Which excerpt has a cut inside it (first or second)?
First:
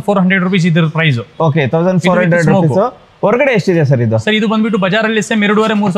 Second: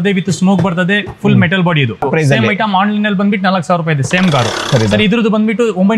second